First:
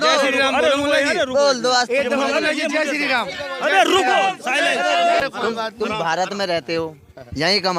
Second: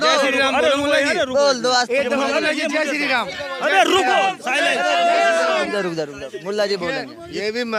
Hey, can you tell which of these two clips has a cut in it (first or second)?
first